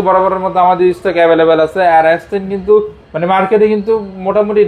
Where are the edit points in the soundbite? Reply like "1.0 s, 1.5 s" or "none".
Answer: none